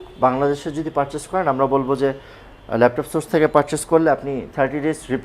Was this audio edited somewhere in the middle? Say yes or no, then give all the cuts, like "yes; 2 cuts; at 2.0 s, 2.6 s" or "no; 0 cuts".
no; 0 cuts